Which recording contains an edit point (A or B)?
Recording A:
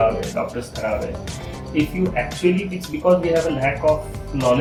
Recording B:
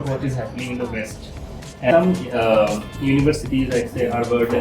B